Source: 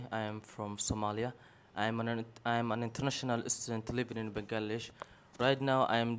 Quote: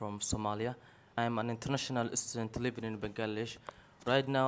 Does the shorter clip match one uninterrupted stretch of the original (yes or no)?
no